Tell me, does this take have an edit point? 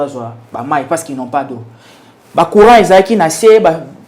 no; 0 cuts

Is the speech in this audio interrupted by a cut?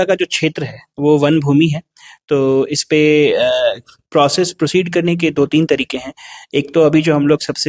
no; 0 cuts

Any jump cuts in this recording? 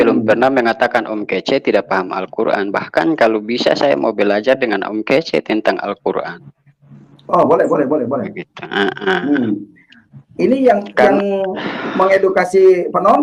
no; 0 cuts

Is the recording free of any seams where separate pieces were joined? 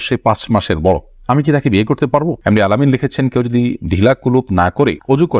no; 1 cut; at 2.4 s

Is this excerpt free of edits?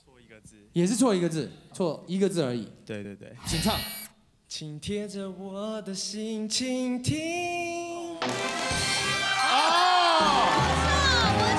yes; 0 cuts

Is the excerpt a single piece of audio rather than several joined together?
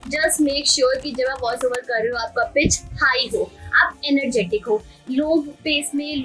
yes; 0 cuts

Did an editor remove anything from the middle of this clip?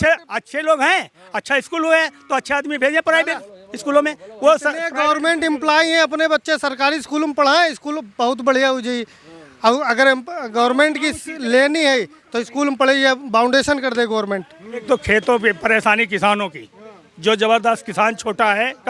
yes; 1 cut; at 14.8 s

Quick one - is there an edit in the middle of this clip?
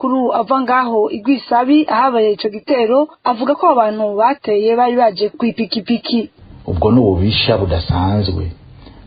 yes; 1 cut; at 6.4 s

